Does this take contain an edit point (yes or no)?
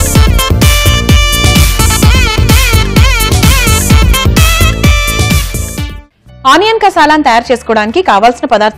yes